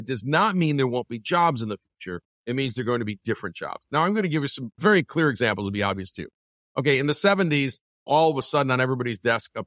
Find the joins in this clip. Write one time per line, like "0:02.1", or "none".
0:04.6
0:08.1